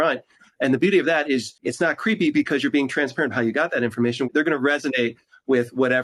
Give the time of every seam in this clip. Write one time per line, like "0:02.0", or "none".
0:01.6
0:04.3